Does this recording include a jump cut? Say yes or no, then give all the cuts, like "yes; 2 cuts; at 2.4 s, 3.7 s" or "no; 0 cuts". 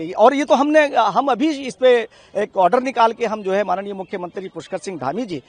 no; 0 cuts